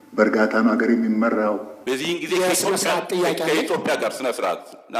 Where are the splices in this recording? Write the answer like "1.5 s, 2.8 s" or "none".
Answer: 1.7 s

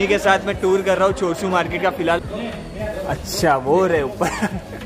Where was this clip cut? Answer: 2.2 s

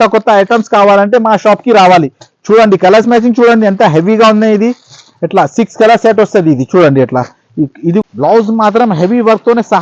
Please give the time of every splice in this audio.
8.0 s

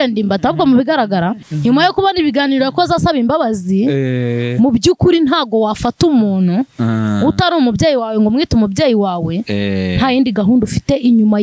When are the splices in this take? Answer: none

